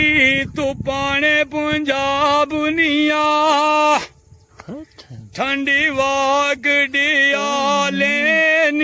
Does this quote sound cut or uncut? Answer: uncut